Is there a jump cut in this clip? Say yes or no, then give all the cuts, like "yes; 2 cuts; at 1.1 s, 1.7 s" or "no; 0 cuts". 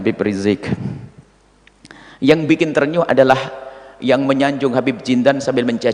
no; 0 cuts